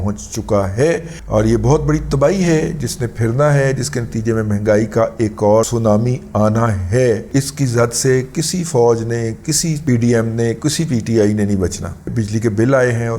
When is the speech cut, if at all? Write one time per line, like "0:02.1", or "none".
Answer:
0:05.7
0:07.2
0:12.0